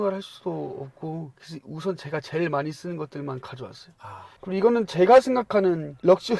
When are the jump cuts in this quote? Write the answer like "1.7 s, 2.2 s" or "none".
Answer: 4.4 s

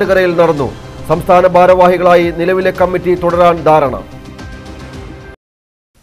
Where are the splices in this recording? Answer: none

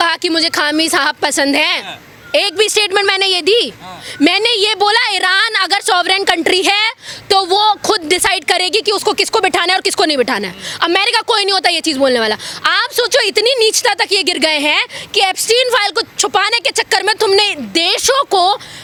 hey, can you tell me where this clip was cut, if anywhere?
none

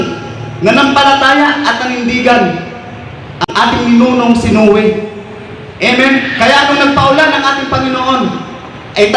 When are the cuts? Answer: 3.4 s

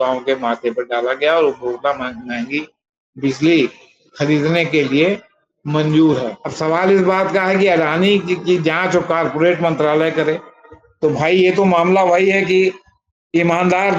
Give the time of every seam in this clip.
6.4 s

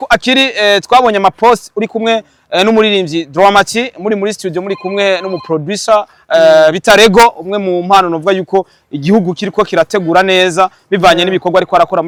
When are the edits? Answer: none

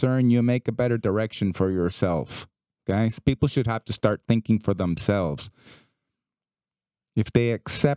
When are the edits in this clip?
none

